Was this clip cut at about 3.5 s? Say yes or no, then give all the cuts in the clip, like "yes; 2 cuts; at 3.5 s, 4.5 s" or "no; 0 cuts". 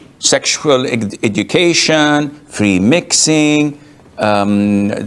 no; 0 cuts